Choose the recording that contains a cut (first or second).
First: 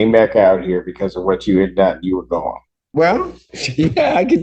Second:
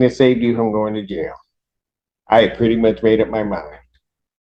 first